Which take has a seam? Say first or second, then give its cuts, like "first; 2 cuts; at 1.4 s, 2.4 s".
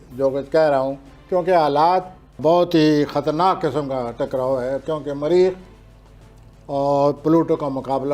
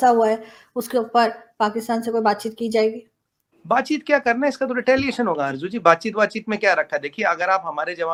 first; 1 cut; at 2.4 s